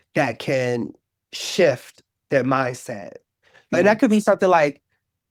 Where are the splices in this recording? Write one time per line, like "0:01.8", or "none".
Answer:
none